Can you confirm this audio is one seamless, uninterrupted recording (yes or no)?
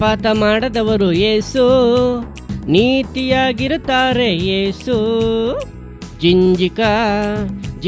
yes